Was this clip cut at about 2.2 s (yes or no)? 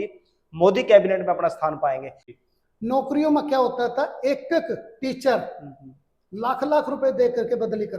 yes